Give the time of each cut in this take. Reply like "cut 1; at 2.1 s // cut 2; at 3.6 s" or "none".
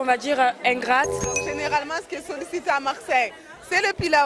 cut 1; at 1.4 s